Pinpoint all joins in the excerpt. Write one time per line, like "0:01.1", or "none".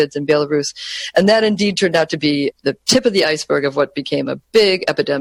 none